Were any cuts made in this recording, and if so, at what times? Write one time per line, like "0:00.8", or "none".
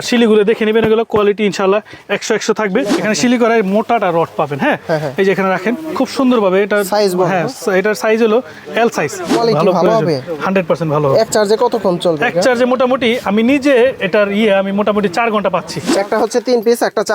0:03.0
0:09.4
0:15.9